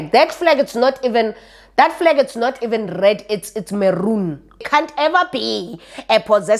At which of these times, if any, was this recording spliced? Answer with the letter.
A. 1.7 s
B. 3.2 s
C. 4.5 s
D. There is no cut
C